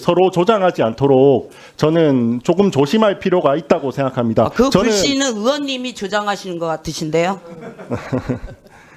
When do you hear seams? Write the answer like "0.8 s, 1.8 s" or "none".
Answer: none

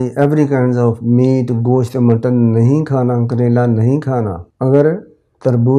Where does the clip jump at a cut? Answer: 4.4 s

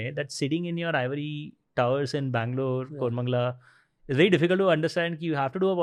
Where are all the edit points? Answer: none

